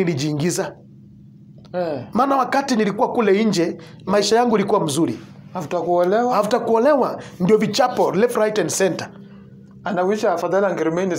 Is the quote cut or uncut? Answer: uncut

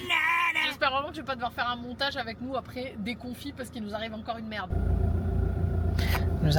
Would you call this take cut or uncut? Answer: uncut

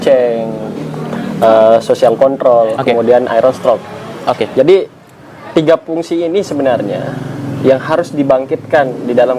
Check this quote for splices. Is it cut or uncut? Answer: uncut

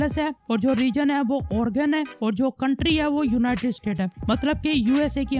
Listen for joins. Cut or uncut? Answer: uncut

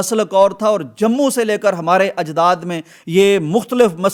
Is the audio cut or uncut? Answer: uncut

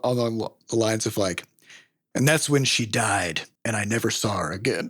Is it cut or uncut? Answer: cut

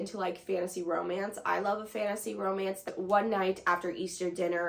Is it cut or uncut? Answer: cut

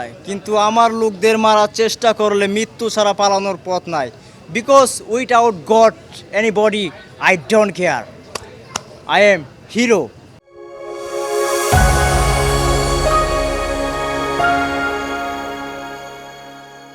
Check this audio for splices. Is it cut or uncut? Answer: uncut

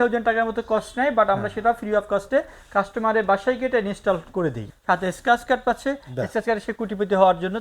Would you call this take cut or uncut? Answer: cut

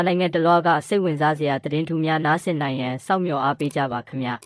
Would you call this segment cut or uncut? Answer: uncut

